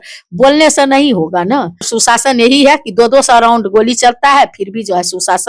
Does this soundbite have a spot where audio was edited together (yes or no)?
yes